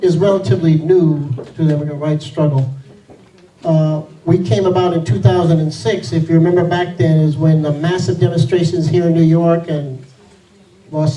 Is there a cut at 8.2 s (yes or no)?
no